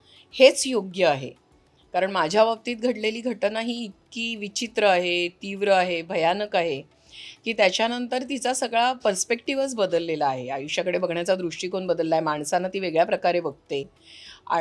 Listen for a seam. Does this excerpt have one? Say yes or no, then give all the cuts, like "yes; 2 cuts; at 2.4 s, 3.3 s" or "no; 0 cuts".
no; 0 cuts